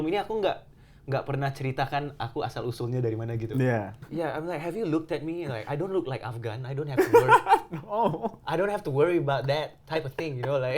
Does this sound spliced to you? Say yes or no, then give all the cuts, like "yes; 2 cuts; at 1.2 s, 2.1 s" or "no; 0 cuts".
yes; 1 cut; at 4.0 s